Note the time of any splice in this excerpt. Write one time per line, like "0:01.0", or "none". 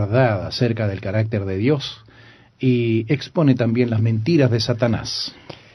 0:02.3